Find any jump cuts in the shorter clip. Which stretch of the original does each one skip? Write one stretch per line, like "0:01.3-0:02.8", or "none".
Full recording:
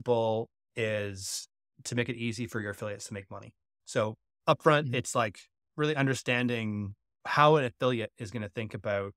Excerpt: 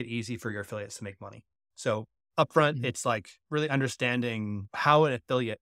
0:05.4-0:05.6
0:06.9-0:07.2